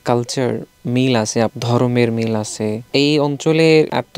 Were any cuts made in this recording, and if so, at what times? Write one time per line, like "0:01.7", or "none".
0:01.6
0:02.9